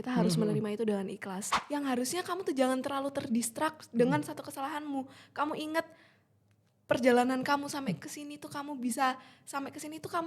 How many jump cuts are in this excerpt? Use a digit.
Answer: 1